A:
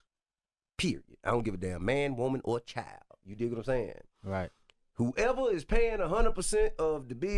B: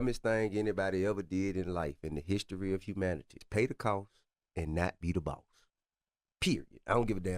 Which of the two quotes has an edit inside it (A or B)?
B